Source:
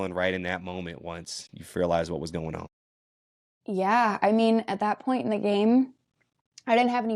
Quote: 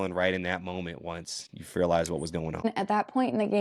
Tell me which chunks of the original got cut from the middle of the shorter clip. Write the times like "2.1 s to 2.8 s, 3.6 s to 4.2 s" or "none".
2.6 s to 4.6 s